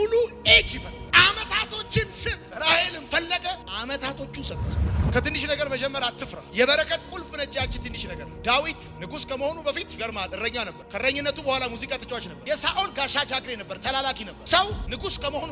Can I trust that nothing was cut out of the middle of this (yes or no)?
no